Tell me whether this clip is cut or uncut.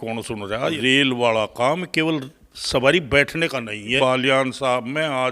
cut